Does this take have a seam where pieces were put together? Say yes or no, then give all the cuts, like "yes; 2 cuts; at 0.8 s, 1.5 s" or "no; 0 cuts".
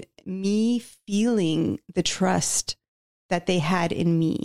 no; 0 cuts